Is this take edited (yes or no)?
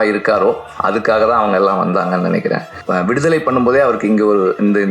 yes